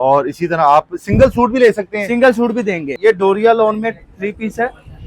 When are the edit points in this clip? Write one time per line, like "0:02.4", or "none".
0:02.8